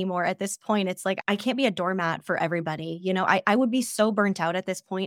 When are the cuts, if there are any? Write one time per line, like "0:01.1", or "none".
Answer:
0:01.2